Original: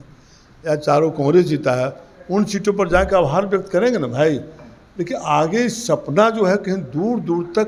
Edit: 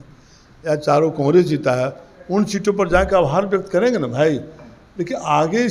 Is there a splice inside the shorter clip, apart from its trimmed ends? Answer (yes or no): no